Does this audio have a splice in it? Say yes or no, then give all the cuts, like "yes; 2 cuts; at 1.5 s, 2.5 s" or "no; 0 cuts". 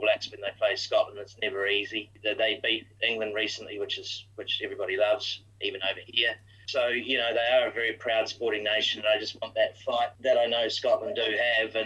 yes; 4 cuts; at 2.1 s, 5.4 s, 6.7 s, 10.1 s